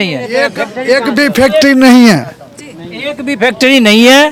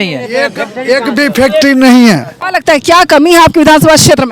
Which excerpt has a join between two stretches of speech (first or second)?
second